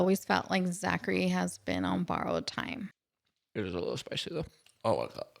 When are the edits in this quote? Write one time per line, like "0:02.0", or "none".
0:03.0